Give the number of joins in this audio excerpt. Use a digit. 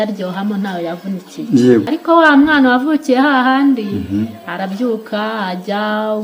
1